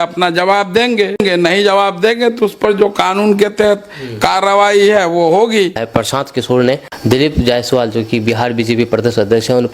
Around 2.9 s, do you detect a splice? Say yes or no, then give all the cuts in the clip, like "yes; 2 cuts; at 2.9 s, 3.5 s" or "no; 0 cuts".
no; 3 cuts; at 1.2 s, 5.8 s, 6.9 s